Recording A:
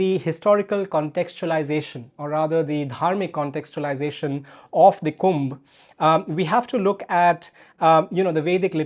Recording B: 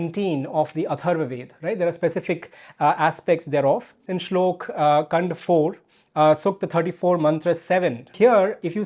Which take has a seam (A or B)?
B